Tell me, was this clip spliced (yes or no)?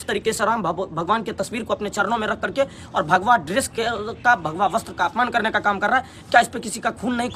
no